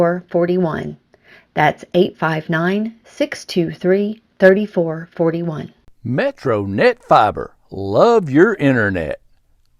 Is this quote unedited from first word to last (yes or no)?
no